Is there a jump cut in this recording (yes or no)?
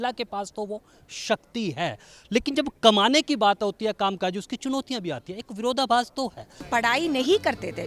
yes